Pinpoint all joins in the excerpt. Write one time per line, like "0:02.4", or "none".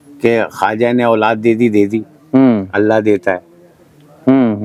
none